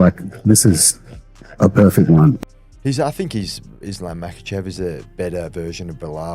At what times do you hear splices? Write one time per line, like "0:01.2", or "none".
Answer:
0:02.4